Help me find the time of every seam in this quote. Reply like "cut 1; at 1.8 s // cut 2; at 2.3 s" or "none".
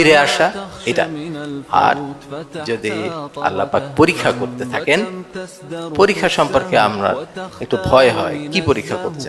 none